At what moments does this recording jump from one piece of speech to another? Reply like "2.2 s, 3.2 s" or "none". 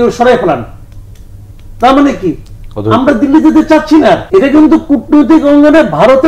4.2 s

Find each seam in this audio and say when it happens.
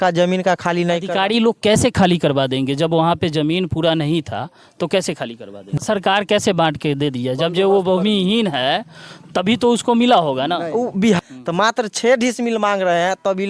5.7 s, 11.2 s

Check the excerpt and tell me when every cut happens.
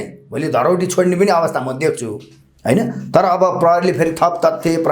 none

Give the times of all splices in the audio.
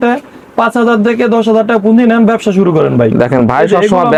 none

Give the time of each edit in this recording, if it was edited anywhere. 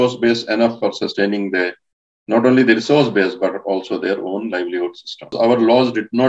5.3 s

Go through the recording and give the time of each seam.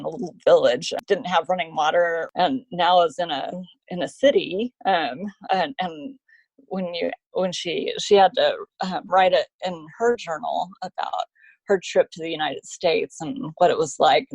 0.9 s, 2.3 s

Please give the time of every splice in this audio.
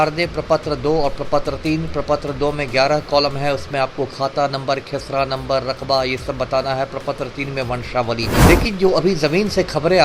8.4 s

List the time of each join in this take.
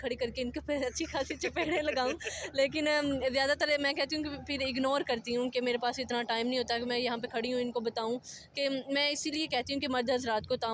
none

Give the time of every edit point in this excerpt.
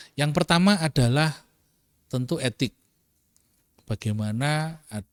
none

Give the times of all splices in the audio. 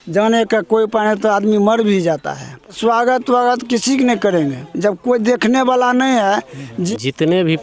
2.8 s, 6.9 s

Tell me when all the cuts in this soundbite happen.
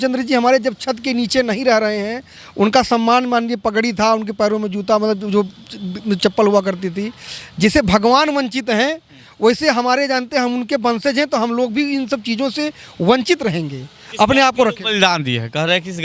none

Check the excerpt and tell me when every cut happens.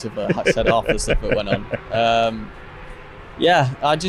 none

